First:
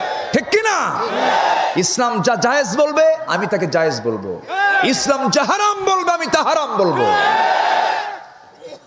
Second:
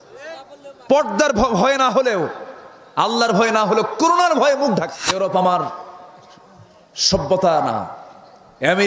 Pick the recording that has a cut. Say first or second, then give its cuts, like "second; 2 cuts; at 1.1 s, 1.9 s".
second; 1 cut; at 5.0 s